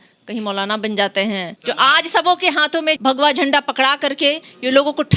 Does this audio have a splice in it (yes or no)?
yes